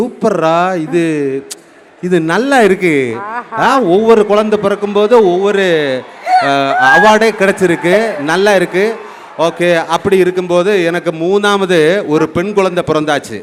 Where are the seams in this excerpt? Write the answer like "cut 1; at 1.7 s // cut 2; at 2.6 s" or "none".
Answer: none